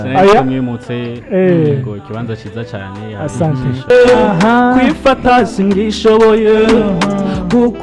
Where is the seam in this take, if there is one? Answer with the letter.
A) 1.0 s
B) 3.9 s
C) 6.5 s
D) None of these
B